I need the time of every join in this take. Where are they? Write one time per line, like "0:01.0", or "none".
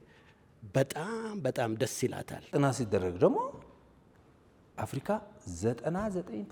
0:02.5